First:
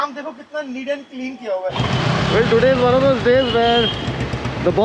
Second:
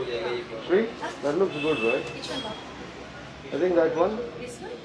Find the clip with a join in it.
first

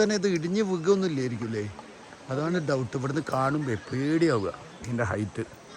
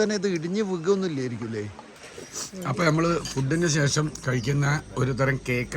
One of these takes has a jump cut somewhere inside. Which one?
second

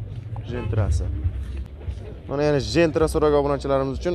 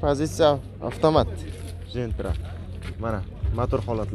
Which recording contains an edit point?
first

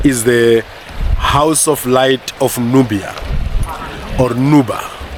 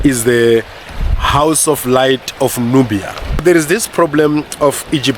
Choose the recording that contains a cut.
second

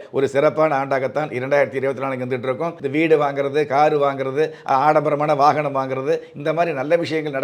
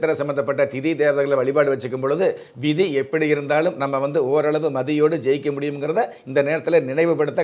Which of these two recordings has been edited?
first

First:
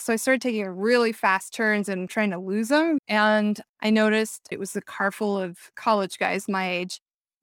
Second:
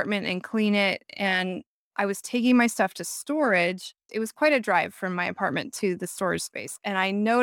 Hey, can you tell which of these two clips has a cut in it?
first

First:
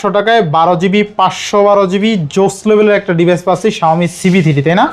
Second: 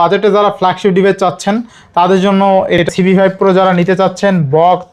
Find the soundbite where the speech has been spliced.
second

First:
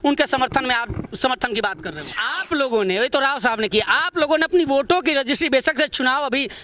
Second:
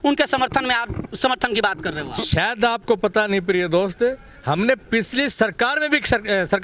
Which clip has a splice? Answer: first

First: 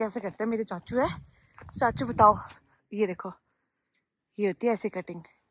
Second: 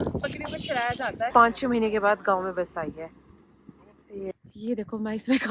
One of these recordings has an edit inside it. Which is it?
second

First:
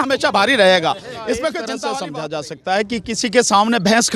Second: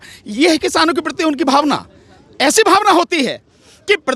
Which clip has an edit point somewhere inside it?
first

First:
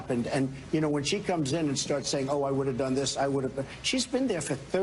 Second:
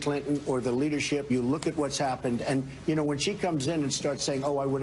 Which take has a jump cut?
second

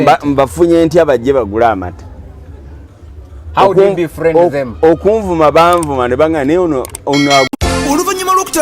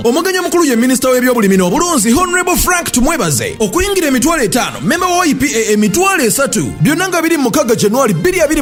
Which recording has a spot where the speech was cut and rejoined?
first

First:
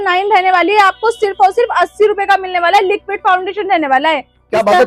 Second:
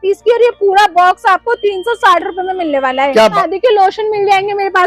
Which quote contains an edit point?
second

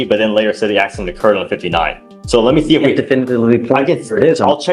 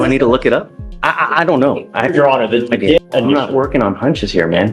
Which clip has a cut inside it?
second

